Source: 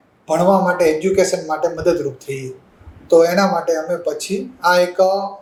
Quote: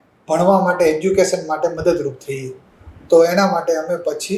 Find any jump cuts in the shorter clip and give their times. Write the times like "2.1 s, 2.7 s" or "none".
none